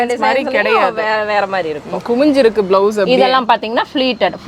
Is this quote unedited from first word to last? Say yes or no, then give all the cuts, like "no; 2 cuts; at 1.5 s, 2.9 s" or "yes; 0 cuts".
yes; 0 cuts